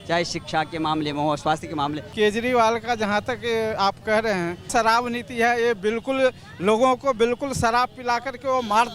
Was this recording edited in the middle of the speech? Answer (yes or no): yes